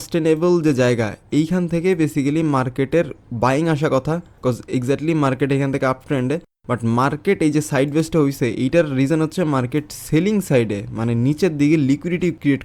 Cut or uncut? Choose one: uncut